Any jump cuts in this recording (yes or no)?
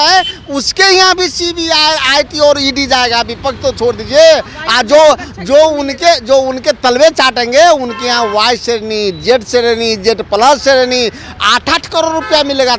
no